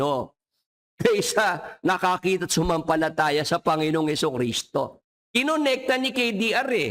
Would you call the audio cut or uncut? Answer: uncut